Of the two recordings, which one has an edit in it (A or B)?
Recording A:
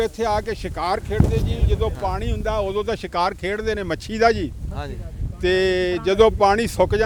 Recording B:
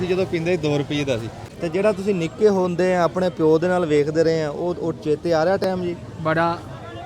B